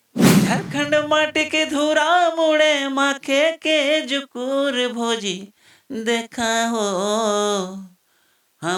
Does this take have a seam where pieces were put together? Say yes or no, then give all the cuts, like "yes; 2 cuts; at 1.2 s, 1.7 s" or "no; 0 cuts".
no; 0 cuts